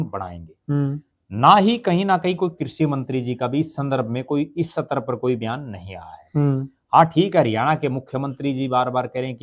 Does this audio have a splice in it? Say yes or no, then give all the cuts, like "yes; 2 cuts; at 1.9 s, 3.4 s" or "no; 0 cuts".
no; 0 cuts